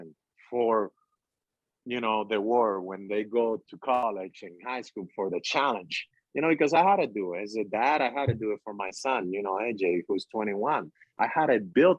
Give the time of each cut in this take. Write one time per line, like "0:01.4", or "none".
0:04.0

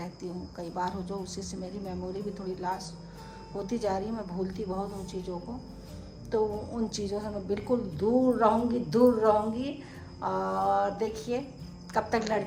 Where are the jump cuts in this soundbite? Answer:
none

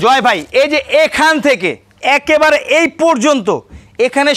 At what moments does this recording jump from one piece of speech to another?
none

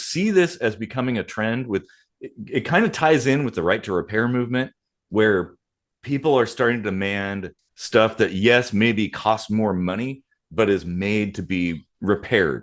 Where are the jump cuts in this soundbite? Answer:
none

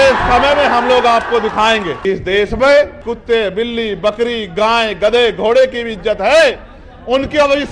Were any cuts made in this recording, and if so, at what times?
0:01.9
0:03.1

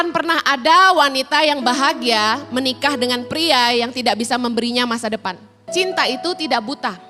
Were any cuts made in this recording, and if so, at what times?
0:05.7

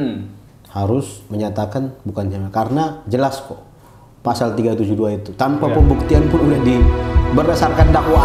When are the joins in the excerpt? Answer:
none

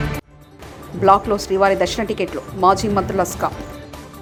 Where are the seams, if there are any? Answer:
none

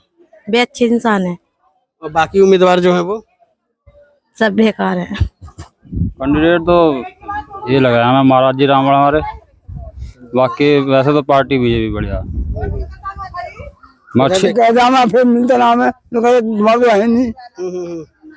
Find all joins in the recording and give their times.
0:05.8
0:14.5

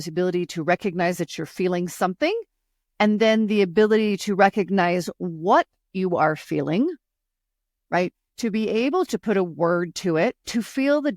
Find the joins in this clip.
none

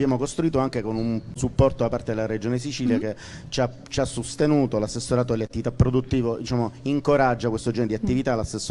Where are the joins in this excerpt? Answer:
0:01.4

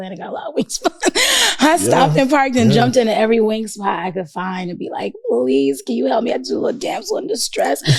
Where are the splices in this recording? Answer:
none

